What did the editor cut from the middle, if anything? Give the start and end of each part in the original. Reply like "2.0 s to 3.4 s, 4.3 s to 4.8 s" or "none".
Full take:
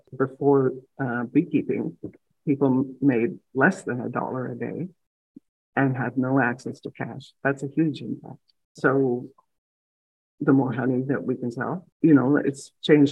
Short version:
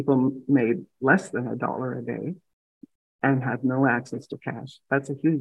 none